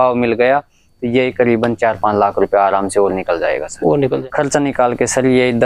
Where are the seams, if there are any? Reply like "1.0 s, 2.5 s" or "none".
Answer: 4.2 s